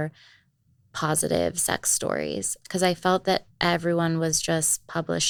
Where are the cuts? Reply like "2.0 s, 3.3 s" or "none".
none

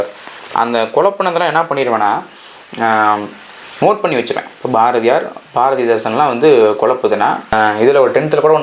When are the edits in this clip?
7.5 s

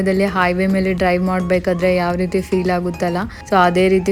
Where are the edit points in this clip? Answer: none

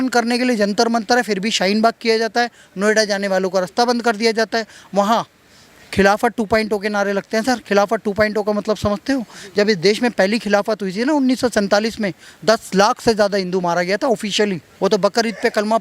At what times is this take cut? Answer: 14.7 s

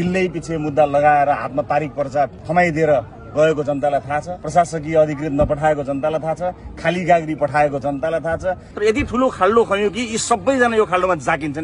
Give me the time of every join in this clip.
2.4 s, 4.3 s, 8.7 s

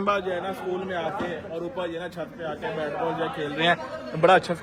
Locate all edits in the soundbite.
none

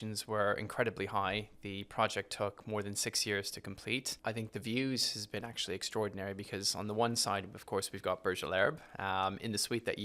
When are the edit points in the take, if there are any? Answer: 4.1 s

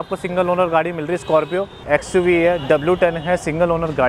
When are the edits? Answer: 1.8 s

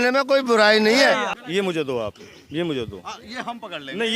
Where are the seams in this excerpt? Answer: 1.8 s

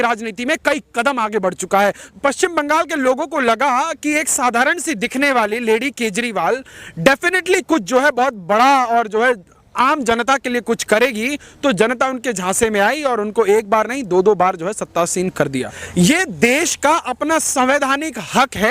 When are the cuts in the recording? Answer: 2.1 s, 15.8 s

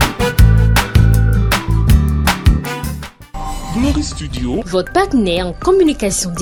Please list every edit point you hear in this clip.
none

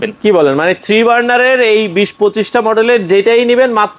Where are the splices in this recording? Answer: none

